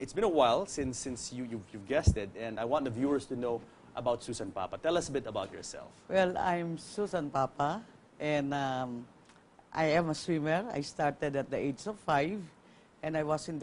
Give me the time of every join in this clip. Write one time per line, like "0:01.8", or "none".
0:08.5